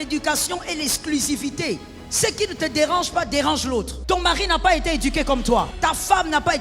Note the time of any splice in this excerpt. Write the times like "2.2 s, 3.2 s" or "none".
2.0 s, 3.9 s, 5.7 s